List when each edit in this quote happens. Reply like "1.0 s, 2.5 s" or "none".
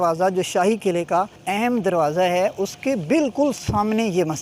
1.4 s